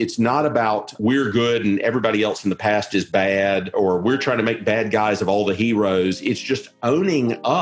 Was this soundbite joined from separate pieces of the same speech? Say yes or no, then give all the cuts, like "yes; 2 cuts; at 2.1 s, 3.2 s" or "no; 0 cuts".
yes; 2 cuts; at 0.9 s, 3.7 s